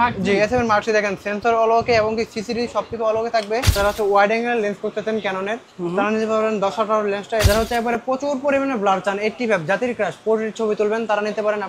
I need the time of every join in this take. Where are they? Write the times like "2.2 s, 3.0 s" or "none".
3.7 s, 7.5 s